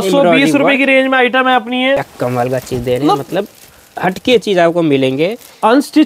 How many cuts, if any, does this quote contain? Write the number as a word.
one